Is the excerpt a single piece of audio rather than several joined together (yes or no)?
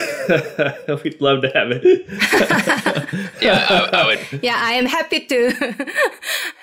yes